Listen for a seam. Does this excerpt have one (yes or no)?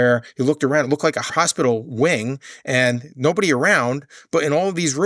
yes